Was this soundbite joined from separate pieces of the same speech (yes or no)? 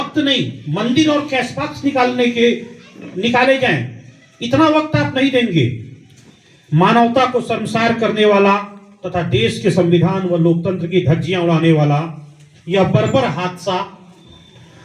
no